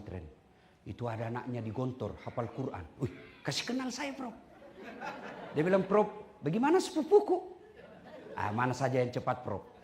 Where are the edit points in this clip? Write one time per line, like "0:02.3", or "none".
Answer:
none